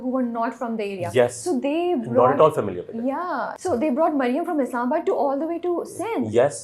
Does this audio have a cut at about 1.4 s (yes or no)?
no